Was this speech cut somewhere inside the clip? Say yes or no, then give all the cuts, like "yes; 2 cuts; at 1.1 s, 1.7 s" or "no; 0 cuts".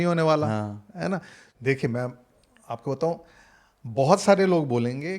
yes; 1 cut; at 1.5 s